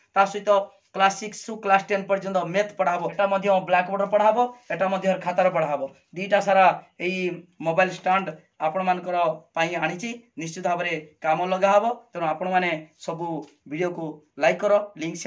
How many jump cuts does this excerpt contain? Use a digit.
1